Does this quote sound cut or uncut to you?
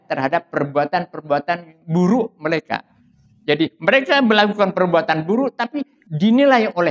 uncut